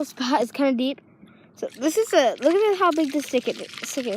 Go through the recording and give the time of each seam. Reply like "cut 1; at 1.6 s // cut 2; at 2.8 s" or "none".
none